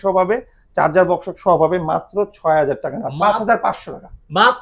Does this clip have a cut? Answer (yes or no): no